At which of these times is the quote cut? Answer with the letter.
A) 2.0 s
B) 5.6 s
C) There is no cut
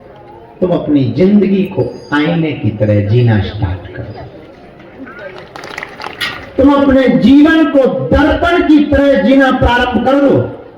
B